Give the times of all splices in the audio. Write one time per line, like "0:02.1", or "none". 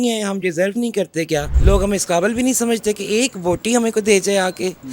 0:01.5